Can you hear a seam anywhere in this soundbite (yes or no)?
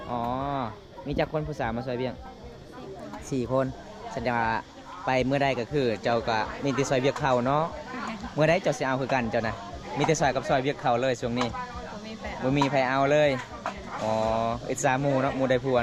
no